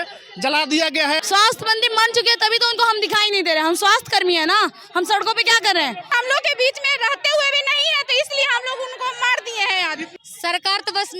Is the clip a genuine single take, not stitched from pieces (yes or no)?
no